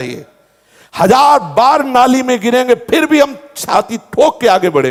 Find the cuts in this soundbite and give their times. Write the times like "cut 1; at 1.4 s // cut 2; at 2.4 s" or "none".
none